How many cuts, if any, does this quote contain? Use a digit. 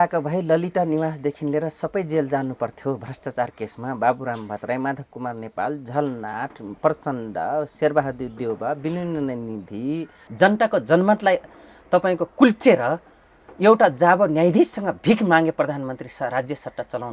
1